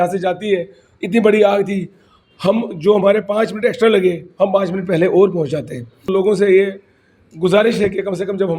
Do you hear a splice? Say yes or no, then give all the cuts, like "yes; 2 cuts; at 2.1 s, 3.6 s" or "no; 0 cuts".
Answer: yes; 1 cut; at 6.0 s